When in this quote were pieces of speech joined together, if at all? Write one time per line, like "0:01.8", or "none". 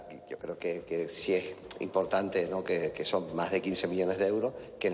none